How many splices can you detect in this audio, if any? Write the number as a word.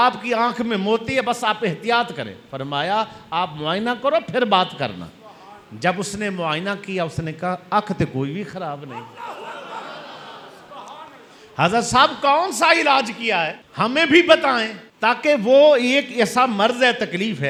zero